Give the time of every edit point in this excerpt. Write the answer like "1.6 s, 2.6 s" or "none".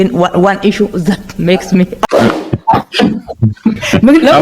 2.0 s